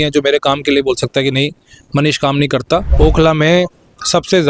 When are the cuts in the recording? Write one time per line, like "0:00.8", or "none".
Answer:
0:02.9